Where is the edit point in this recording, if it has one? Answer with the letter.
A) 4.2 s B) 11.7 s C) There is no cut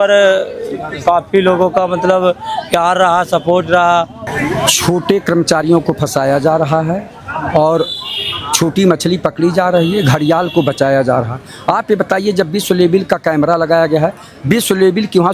A